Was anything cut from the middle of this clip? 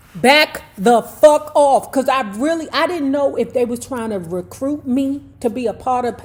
no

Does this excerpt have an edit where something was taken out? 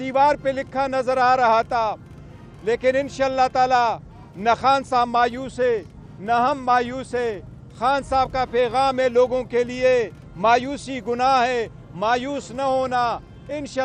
no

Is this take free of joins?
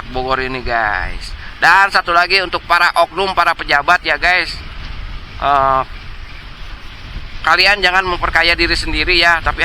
yes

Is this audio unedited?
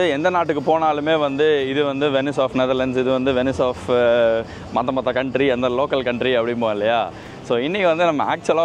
yes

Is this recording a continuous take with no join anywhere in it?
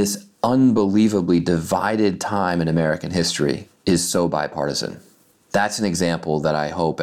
yes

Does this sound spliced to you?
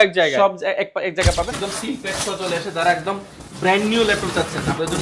yes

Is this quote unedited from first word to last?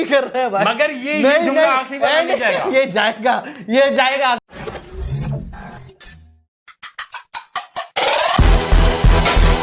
no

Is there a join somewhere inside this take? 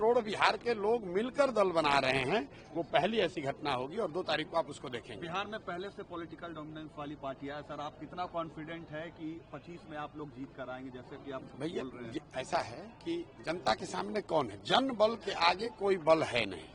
no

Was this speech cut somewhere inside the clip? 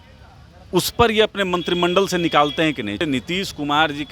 yes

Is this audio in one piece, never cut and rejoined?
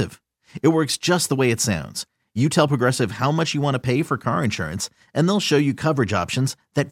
yes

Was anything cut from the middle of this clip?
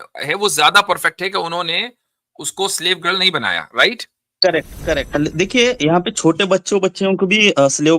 yes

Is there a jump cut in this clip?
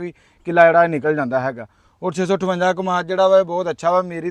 no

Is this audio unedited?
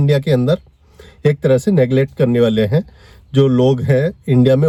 yes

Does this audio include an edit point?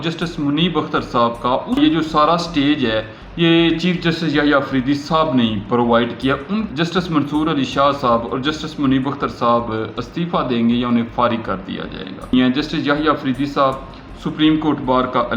yes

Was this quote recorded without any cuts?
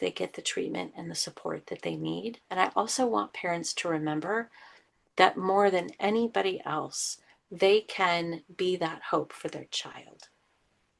no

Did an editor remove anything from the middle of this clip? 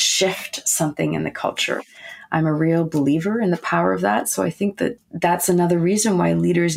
yes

